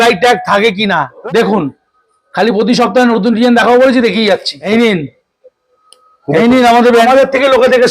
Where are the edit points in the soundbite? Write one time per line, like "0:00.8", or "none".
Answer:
0:01.2
0:04.6
0:07.0